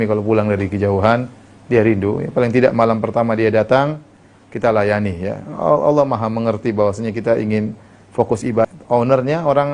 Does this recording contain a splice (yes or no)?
yes